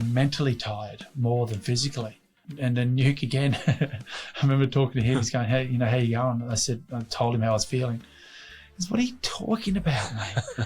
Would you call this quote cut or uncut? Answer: cut